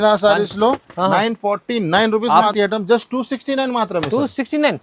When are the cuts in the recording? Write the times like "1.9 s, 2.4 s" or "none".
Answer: 2.5 s